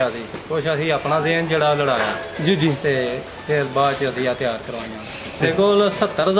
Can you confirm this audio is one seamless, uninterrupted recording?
no; 1 cut; at 5.4 s

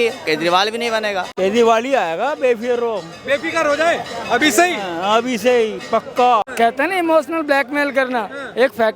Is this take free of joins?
no; 2 cuts; at 1.3 s, 6.5 s

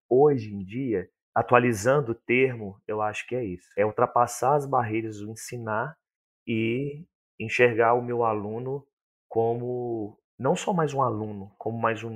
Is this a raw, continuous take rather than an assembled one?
yes; 0 cuts

